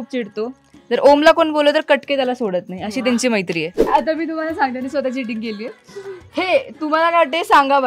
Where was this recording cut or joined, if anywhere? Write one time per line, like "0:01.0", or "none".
0:03.9